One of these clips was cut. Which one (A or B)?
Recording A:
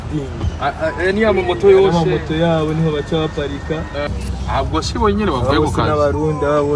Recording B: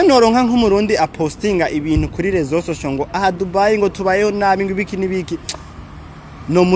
A